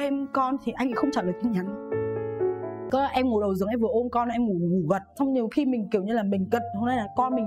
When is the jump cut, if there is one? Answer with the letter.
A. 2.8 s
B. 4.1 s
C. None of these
A